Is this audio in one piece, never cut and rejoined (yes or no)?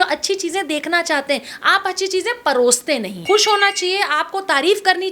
no